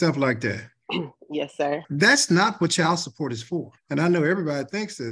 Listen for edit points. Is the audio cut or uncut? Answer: cut